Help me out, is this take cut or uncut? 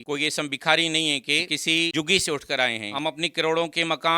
cut